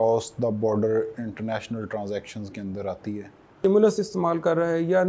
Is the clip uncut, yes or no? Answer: no